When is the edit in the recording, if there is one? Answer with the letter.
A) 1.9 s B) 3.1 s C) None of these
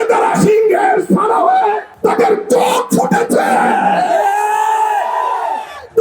A